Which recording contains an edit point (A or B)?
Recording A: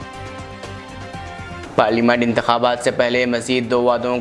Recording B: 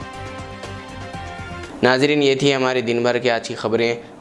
A